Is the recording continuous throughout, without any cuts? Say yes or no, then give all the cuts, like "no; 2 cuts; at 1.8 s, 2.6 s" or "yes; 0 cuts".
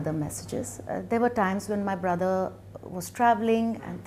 yes; 0 cuts